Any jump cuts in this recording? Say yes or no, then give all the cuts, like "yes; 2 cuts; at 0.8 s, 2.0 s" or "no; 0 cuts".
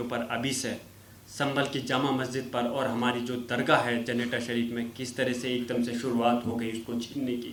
no; 0 cuts